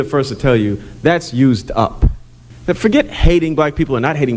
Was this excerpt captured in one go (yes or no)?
no